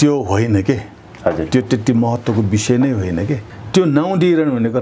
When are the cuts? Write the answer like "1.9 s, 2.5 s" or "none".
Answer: 3.4 s